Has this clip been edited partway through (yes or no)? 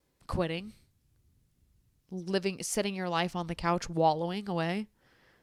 no